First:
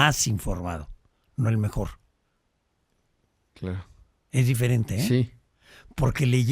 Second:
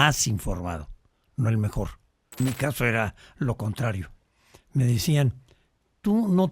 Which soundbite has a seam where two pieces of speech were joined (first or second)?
second